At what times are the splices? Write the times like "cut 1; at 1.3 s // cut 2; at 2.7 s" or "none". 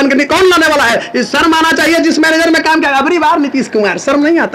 none